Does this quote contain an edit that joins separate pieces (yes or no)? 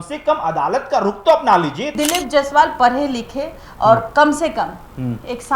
yes